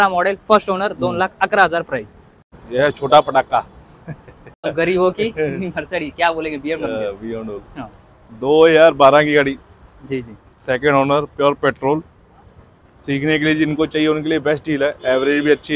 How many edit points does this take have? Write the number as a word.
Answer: zero